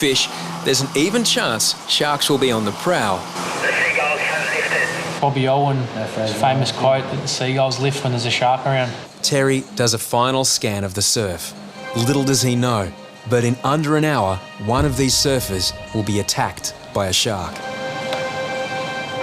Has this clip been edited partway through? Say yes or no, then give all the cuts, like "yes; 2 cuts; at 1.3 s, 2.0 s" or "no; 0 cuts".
yes; 7 cuts; at 3.4 s, 5.1 s, 9.1 s, 11.8 s, 14.5 s, 15.8 s, 17.6 s